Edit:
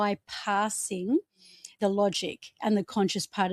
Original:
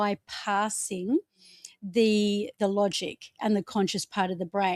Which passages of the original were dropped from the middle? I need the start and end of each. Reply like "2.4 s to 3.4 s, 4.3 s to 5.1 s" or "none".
1.7 s to 2.5 s